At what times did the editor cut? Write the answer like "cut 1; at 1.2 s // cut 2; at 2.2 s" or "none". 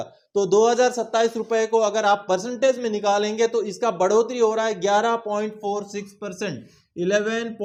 none

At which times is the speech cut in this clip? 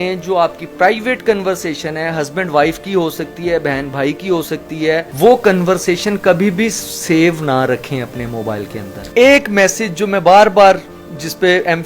cut 1; at 5.1 s // cut 2; at 9.1 s

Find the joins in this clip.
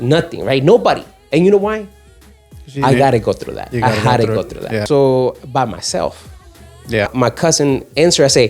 cut 1; at 4.8 s // cut 2; at 7.1 s

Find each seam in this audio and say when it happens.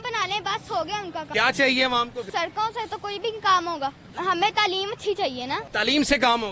cut 1; at 1.3 s // cut 2; at 2.2 s // cut 3; at 4.1 s // cut 4; at 5.7 s

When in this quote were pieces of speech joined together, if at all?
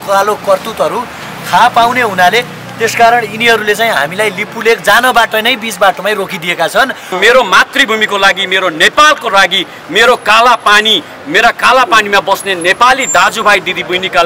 cut 1; at 7.1 s

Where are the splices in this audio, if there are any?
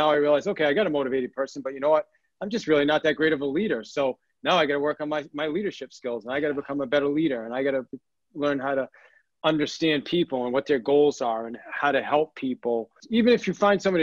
cut 1; at 13.0 s

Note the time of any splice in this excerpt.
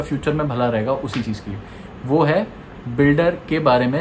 none

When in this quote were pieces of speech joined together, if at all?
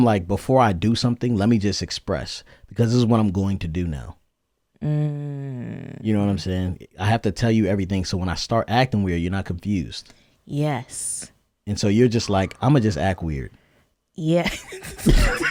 none

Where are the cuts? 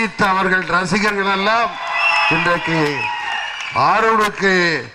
none

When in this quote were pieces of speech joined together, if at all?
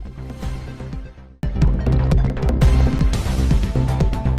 cut 1; at 0.9 s

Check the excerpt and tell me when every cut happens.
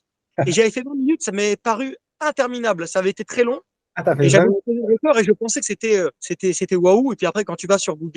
cut 1; at 2.0 s // cut 2; at 6.2 s

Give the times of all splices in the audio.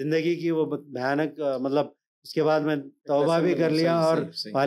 none

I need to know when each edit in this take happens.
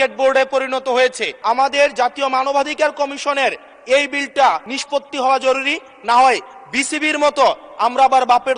cut 1; at 1.3 s // cut 2; at 4.7 s

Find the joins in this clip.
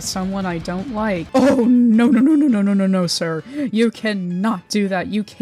cut 1; at 1.2 s

